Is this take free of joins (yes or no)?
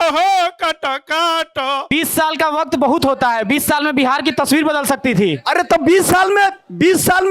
no